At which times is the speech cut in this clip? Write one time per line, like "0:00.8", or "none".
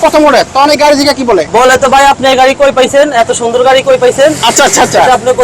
0:01.5